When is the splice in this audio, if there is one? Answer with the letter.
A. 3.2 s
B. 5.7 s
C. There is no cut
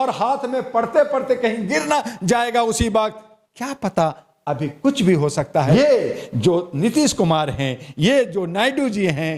B